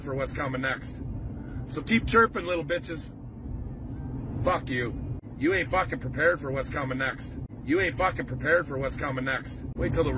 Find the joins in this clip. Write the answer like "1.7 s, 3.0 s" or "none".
none